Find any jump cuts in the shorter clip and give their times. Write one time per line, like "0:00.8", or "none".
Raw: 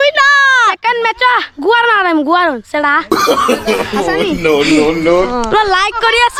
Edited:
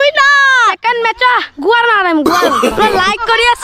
0:02.7